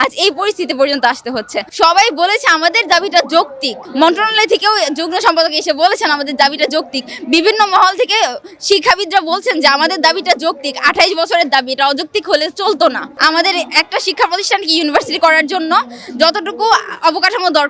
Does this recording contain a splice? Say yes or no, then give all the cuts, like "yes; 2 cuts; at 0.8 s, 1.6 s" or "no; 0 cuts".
no; 0 cuts